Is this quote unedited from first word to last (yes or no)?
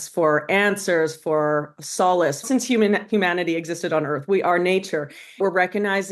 no